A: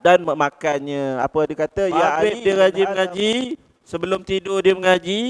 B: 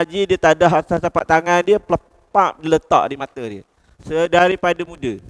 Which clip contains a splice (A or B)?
A